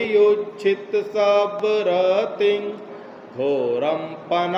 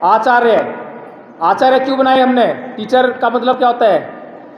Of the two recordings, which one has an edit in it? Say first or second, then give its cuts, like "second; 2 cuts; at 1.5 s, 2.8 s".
second; 1 cut; at 2.7 s